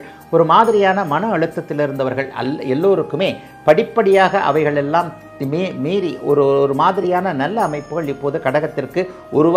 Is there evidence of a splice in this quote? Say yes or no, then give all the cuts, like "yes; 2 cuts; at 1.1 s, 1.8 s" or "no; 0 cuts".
no; 0 cuts